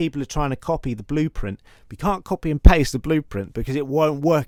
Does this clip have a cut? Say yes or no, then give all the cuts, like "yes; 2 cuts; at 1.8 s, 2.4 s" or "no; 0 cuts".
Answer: no; 0 cuts